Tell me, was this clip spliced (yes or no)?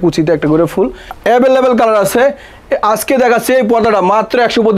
yes